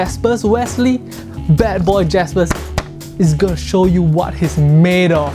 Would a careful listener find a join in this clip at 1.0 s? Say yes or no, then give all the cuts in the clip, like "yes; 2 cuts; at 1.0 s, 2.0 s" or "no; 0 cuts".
no; 0 cuts